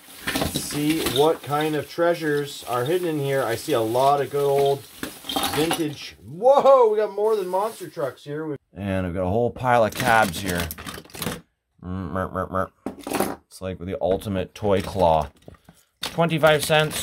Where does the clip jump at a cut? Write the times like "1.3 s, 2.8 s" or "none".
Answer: 8.6 s

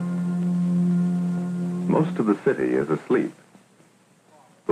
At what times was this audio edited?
none

